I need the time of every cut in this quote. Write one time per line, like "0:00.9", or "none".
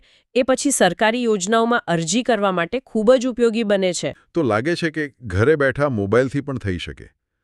0:04.2